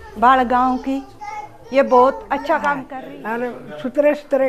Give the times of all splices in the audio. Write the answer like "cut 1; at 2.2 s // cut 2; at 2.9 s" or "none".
cut 1; at 2.9 s